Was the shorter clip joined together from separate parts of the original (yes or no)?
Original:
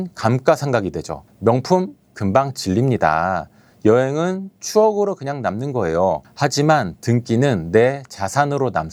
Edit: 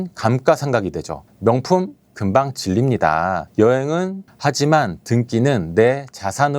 yes